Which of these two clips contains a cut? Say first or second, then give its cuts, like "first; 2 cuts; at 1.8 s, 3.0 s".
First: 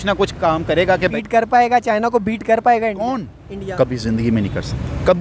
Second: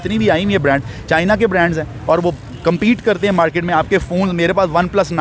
first; 1 cut; at 1.1 s